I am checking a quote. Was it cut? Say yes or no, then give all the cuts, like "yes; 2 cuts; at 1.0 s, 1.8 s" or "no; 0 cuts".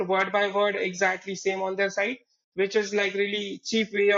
no; 0 cuts